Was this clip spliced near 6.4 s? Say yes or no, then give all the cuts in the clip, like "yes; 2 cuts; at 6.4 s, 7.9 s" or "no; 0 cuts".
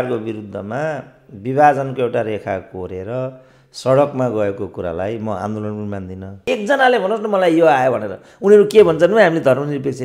yes; 1 cut; at 6.4 s